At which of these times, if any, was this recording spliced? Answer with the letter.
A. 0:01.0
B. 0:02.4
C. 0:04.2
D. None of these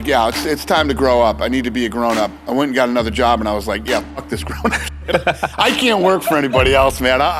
B